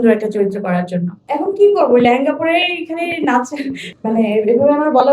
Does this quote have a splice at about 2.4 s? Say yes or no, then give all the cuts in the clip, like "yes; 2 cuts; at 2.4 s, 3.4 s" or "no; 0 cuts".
no; 2 cuts; at 1.2 s, 3.8 s